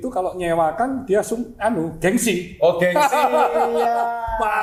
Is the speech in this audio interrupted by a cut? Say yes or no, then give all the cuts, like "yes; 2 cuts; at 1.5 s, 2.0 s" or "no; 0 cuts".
no; 0 cuts